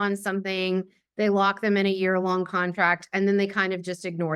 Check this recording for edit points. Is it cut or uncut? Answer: uncut